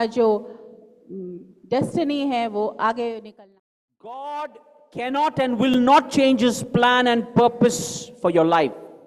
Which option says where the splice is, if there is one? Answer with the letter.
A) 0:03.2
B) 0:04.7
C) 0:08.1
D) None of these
A